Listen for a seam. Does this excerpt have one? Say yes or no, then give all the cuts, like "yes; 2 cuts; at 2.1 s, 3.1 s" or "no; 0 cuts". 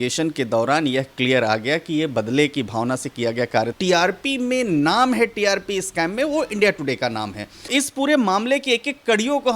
yes; 2 cuts; at 3.7 s, 7.7 s